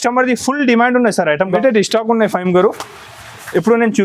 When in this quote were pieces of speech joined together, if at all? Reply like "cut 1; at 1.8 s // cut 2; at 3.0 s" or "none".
cut 1; at 1.6 s

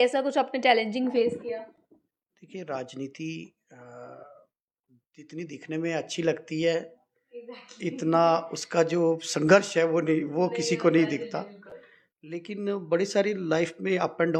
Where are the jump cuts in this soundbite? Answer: none

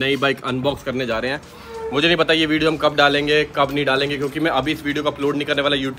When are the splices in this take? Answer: none

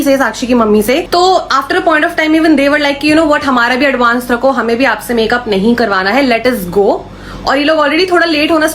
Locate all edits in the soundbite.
none

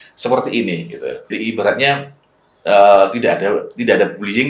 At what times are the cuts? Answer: cut 1; at 1.3 s

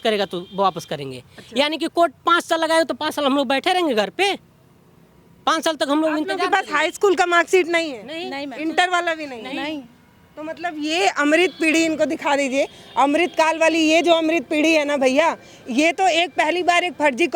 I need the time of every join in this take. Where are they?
none

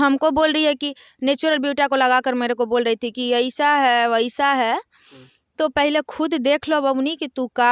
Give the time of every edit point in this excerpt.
none

